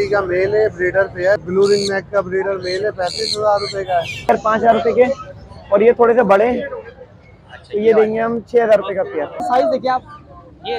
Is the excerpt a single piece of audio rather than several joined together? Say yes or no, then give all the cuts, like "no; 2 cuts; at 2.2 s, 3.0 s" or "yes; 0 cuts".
no; 3 cuts; at 1.4 s, 4.3 s, 9.4 s